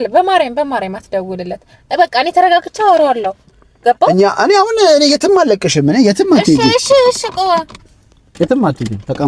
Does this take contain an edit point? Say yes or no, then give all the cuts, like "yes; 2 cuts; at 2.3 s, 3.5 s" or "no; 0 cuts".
no; 0 cuts